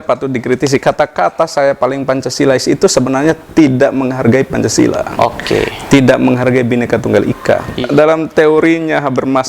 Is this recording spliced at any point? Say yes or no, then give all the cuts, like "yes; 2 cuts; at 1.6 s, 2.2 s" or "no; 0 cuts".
yes; 1 cut; at 7.8 s